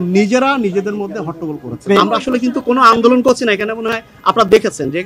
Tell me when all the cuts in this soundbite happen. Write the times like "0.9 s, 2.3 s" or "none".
1.9 s